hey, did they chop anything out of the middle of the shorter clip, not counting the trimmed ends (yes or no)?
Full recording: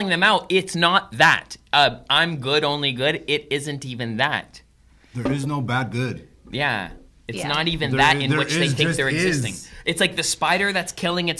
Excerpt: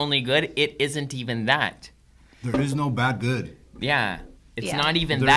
no